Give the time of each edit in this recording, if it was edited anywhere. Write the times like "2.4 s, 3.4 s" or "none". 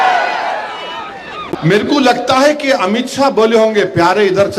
1.5 s